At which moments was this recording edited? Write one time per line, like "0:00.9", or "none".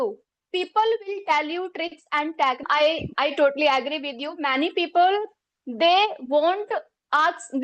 0:02.6